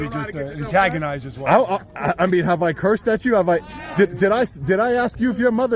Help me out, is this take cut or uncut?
uncut